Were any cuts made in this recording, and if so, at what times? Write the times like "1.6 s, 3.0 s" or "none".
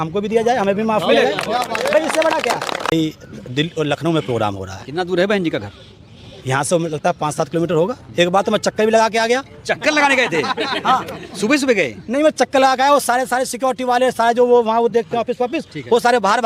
2.9 s